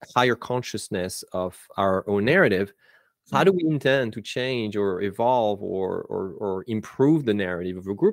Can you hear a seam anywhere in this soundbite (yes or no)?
no